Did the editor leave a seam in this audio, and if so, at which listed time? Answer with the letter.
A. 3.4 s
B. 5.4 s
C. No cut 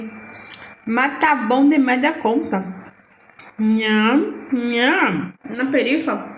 B